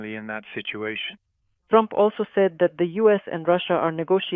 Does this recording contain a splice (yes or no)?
no